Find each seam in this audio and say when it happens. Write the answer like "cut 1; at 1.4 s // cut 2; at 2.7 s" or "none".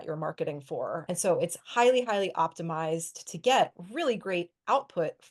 cut 1; at 1.0 s